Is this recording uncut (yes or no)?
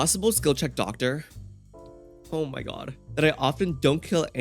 yes